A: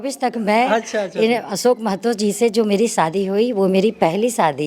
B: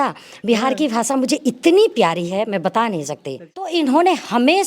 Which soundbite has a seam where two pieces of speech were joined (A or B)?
B